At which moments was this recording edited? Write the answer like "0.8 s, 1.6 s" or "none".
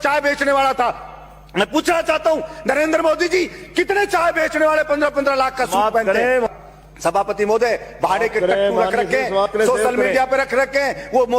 6.5 s